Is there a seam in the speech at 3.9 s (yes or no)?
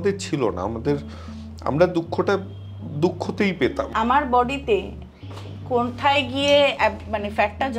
yes